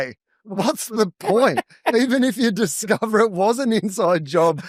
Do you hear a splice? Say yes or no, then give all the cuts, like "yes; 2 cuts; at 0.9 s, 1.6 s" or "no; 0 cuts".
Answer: no; 0 cuts